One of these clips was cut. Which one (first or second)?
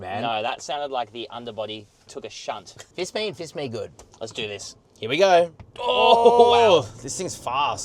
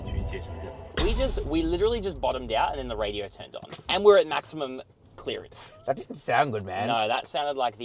first